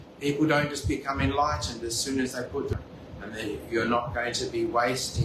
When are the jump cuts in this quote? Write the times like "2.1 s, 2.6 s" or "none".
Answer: 2.7 s